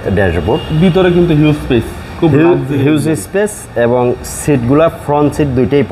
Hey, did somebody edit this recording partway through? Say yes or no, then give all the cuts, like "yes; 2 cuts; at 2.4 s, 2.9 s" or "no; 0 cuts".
no; 0 cuts